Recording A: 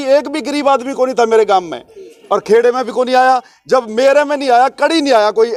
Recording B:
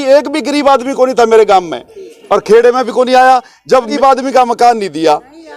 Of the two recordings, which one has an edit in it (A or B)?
B